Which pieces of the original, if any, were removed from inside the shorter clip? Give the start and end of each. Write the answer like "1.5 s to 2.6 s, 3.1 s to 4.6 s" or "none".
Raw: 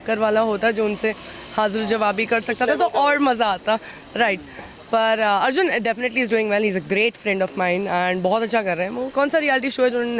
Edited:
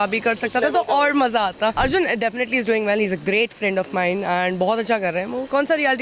3.8 s to 5.4 s

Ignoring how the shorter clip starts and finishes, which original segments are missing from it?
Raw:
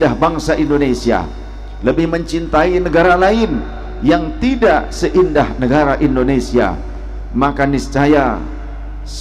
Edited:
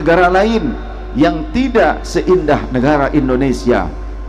none

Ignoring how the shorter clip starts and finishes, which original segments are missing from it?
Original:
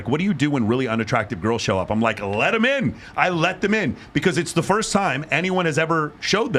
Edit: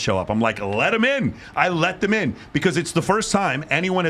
none

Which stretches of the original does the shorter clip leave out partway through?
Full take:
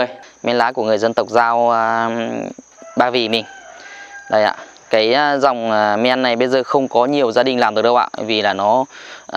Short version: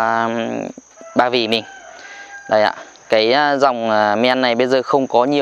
none

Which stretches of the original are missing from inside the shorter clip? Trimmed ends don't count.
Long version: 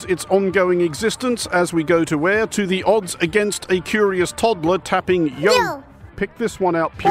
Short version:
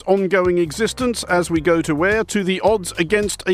none

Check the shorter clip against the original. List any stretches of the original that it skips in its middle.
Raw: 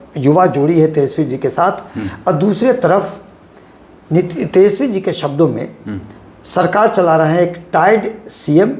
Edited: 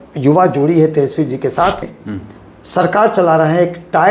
1.9 s to 5.7 s

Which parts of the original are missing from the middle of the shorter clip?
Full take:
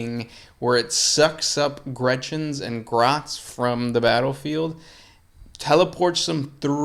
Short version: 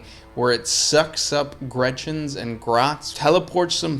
3.3 s to 5.5 s

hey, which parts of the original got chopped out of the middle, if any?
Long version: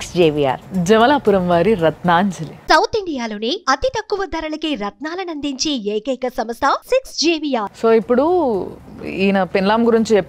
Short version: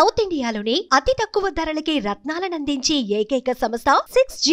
none

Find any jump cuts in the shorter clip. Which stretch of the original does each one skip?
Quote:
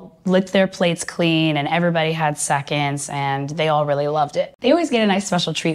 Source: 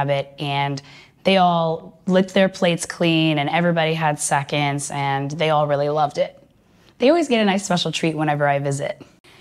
6.5 s to 7.1 s

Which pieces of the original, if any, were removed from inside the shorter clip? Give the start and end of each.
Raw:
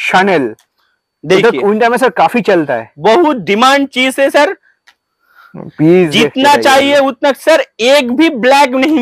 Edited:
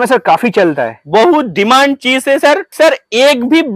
4.6 s to 7.4 s

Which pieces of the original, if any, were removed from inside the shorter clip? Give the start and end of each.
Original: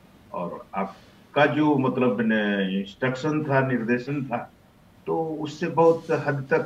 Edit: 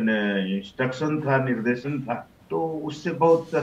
4.6 s to 4.9 s

